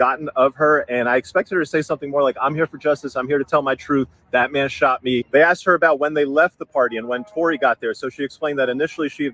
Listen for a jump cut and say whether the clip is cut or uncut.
uncut